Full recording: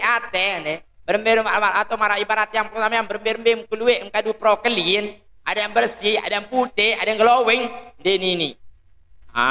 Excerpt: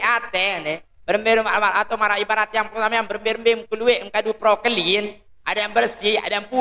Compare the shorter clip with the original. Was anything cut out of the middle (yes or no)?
no